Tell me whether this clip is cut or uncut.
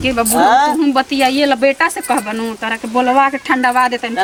uncut